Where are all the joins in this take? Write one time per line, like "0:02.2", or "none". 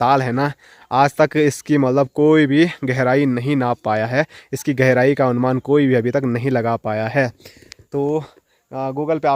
none